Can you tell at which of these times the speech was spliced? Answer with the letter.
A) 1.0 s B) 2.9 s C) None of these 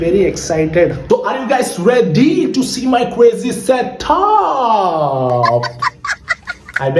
A